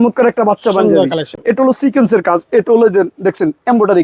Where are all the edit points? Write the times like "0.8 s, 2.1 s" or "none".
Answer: 1.3 s